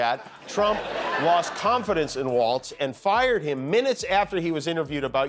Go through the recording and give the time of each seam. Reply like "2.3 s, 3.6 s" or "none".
none